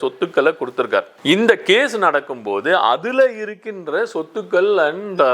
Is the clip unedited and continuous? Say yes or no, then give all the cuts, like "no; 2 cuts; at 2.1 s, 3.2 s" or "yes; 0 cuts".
no; 1 cut; at 1.1 s